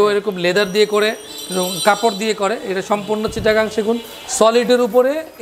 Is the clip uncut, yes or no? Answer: yes